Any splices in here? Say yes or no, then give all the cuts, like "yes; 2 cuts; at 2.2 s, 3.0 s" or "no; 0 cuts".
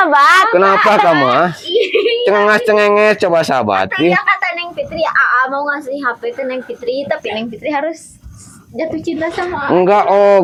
no; 0 cuts